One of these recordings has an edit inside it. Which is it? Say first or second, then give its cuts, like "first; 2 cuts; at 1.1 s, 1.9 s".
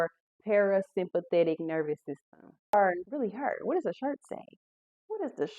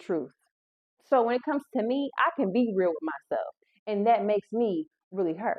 first; 1 cut; at 2.7 s